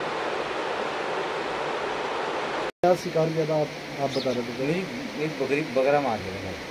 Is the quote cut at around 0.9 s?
no; 1 cut; at 2.8 s

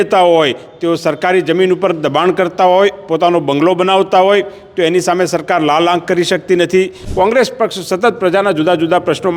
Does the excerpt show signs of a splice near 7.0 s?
yes; 1 cut; at 7.0 s

